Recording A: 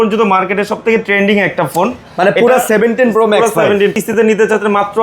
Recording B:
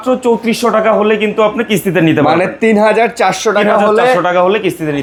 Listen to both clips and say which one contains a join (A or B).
A